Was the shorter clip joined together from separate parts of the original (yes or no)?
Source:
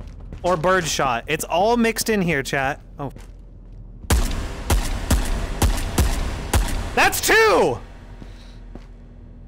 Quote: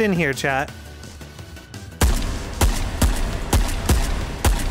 no